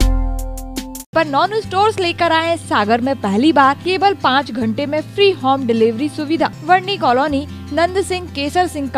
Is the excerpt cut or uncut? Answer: cut